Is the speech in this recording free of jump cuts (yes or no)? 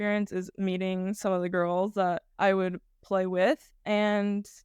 no